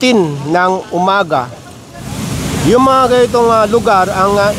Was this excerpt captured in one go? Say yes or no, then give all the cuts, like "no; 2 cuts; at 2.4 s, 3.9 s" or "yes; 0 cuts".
no; 1 cut; at 2.1 s